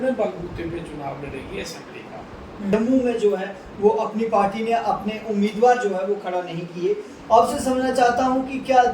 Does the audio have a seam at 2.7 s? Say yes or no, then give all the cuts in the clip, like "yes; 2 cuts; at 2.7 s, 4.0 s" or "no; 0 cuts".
yes; 1 cut; at 2.7 s